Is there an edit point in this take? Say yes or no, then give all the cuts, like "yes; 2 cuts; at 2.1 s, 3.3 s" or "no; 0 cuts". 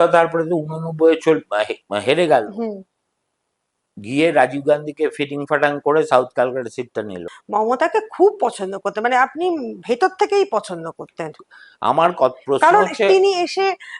yes; 1 cut; at 7.3 s